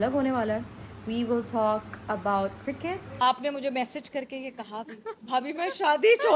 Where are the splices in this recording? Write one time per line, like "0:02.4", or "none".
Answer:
0:03.1